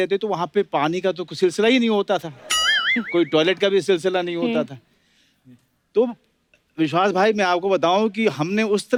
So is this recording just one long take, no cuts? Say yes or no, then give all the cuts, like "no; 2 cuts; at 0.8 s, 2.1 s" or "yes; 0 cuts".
yes; 0 cuts